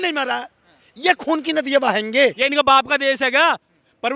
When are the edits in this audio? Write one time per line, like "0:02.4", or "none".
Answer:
0:02.4

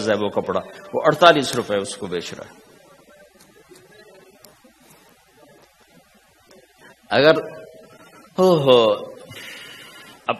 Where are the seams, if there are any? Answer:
none

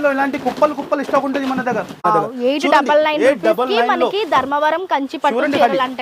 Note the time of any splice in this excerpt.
0:02.0

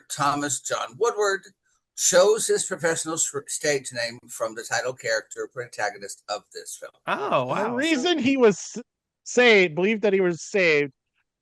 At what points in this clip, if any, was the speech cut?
0:07.6

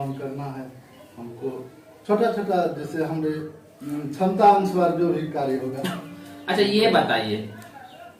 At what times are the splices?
none

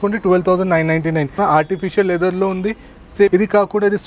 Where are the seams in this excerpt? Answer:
0:01.4
0:03.3

